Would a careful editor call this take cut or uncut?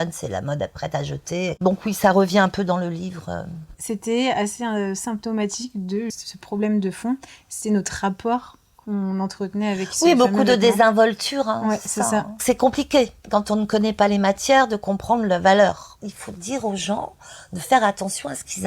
cut